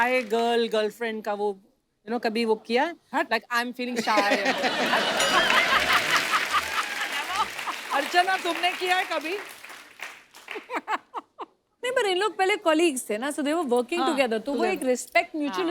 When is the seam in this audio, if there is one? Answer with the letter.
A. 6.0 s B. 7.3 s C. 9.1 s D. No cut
D